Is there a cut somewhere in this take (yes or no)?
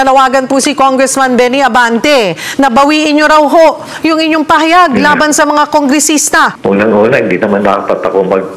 yes